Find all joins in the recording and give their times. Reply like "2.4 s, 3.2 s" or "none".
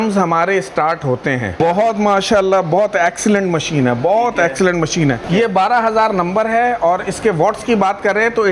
1.6 s, 5.2 s